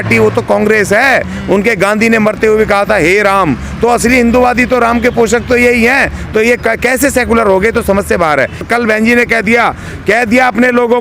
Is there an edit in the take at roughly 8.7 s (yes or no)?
yes